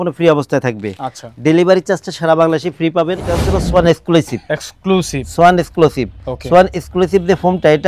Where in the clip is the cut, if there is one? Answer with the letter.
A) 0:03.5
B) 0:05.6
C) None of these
A